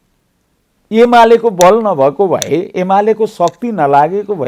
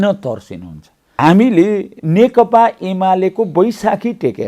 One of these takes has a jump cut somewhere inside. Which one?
second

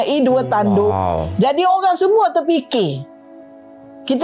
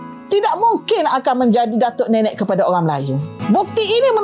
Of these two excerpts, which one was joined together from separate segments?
second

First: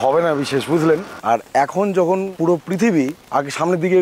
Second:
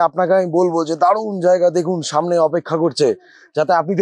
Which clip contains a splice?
first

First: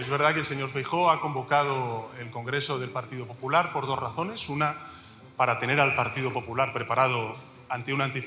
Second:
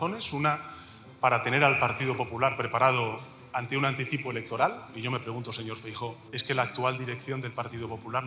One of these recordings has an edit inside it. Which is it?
second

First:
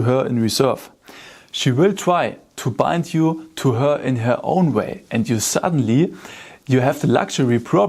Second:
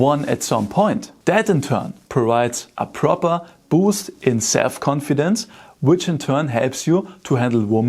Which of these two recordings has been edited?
second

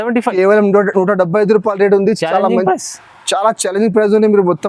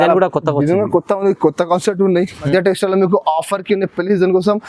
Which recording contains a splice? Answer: second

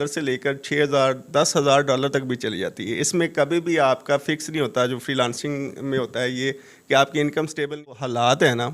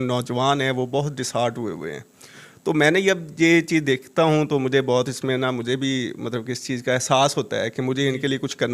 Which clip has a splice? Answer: first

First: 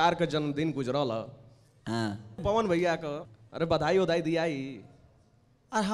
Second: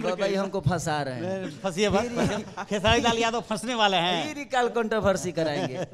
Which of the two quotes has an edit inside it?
first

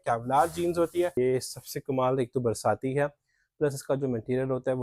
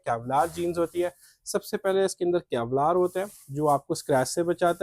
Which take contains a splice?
first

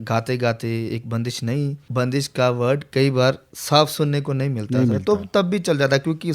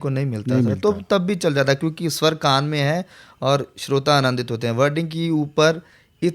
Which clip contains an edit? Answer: first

